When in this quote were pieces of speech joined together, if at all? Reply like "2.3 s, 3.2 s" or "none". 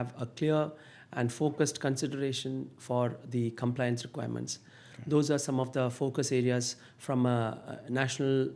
none